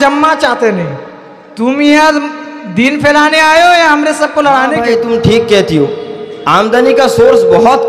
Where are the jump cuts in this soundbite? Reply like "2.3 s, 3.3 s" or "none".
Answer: 4.8 s

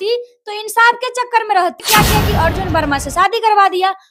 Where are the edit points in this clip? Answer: 1.8 s

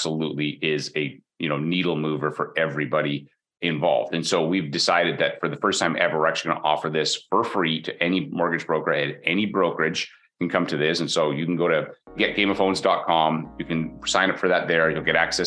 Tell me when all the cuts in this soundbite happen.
12.2 s

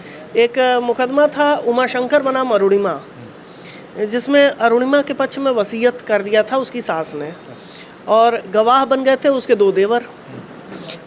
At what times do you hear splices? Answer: none

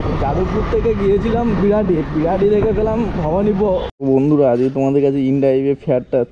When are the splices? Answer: 3.9 s

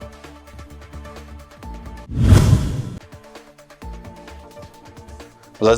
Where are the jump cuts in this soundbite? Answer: 1.8 s

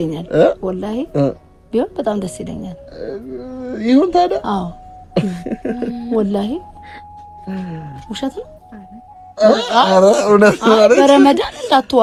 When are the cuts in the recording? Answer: none

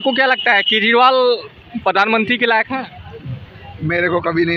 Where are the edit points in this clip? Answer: none

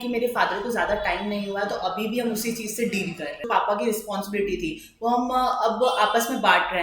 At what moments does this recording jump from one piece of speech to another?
3.5 s

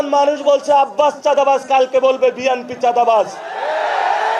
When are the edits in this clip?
none

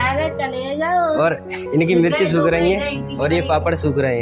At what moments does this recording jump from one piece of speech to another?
none

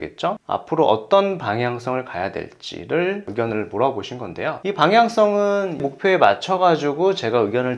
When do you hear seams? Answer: none

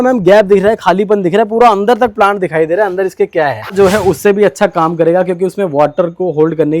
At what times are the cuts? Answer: 3.7 s

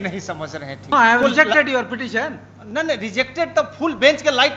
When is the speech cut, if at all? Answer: 0.9 s

